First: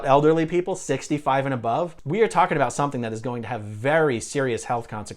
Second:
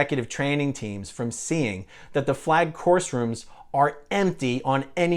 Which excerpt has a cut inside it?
first; 1 cut; at 2.0 s

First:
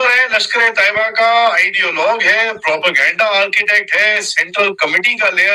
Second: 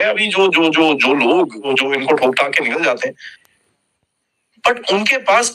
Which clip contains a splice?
second; 2 cuts; at 1.7 s, 3.3 s

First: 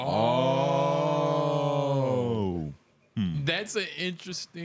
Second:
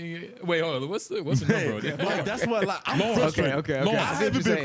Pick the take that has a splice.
second; 1 cut; at 1.9 s

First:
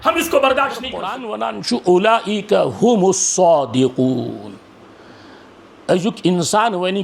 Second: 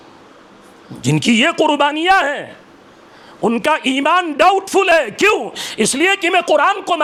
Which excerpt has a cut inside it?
first; 1 cut; at 1.3 s

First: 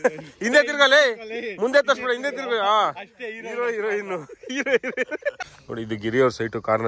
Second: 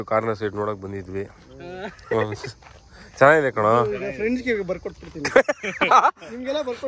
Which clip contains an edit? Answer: first; 1 cut; at 5.5 s

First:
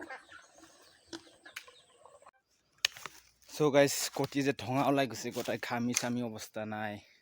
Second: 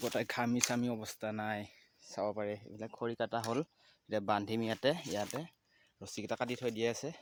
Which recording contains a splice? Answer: first; 1 cut; at 2.3 s

